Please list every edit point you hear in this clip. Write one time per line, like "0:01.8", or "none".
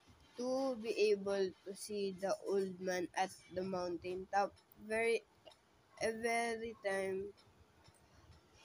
none